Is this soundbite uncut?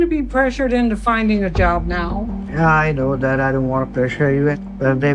yes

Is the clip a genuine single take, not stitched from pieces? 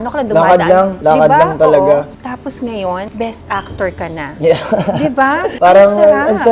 no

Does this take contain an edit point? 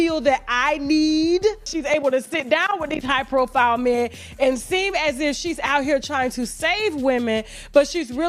yes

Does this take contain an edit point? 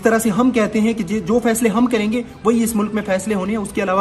no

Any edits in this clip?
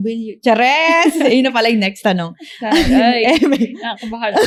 no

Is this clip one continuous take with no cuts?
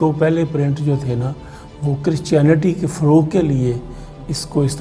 yes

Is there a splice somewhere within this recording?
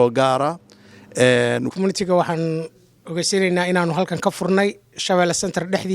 yes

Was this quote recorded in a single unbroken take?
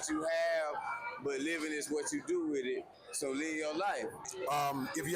no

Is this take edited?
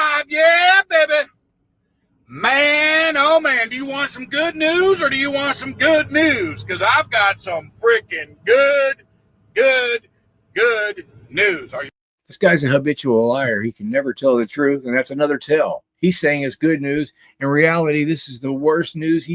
no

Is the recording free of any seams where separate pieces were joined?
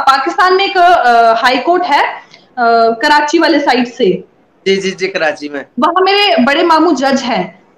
yes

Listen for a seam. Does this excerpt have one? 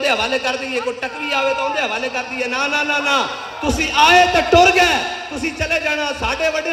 no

